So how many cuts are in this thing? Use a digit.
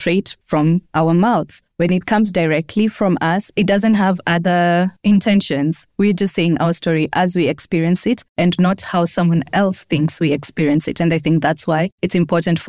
1